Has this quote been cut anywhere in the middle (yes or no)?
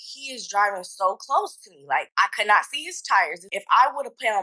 yes